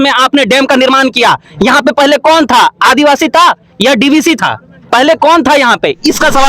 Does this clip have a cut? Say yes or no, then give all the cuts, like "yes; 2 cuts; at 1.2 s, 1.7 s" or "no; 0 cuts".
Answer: no; 0 cuts